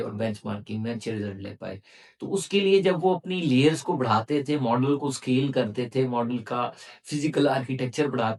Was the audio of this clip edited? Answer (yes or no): no